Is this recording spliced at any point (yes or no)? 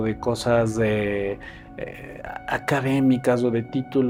no